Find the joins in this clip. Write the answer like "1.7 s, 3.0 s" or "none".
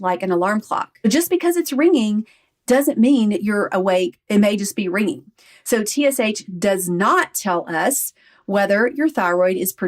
1.3 s, 4.2 s